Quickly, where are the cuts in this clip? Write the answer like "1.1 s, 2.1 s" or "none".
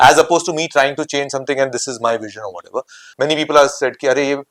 3.0 s